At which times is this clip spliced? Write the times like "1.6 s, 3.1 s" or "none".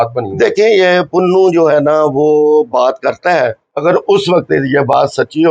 3.7 s